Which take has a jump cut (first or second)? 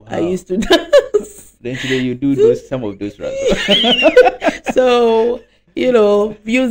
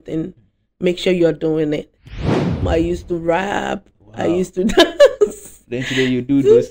second